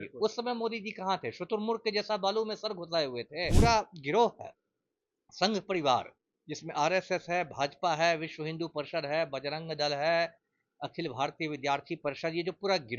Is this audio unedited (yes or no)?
no